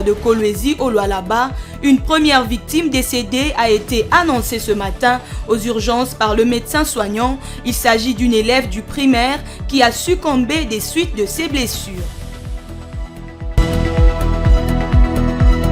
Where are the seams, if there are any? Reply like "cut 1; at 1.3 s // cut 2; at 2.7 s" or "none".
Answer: cut 1; at 13.6 s